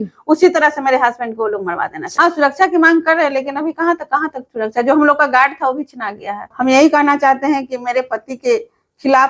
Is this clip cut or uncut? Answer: cut